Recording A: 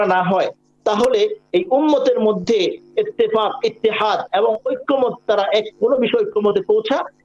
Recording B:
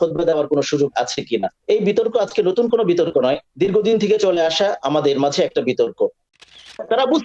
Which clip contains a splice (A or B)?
B